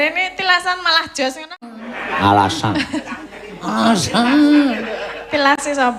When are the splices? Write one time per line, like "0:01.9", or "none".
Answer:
0:01.7